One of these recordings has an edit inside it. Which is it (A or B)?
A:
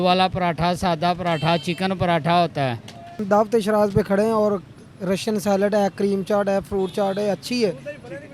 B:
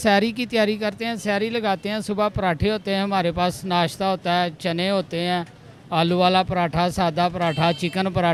A